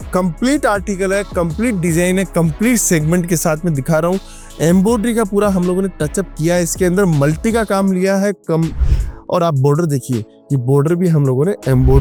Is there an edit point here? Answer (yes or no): no